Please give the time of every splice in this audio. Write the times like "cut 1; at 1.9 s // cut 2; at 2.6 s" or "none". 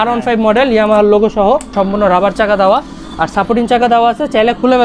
cut 1; at 1.7 s